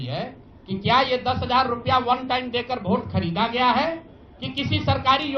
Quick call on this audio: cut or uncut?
uncut